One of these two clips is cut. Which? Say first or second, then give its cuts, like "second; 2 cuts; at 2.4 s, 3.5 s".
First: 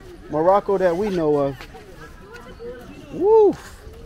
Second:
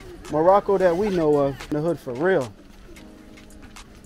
second; 1 cut; at 1.7 s